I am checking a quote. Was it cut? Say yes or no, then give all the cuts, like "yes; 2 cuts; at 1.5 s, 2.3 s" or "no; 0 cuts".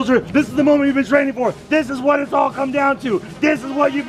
no; 0 cuts